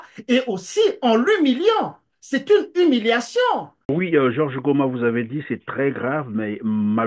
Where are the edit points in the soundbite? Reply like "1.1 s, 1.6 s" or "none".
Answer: 3.9 s